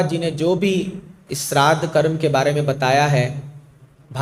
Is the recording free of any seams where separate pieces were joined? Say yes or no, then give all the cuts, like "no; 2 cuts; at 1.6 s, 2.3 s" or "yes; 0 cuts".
yes; 0 cuts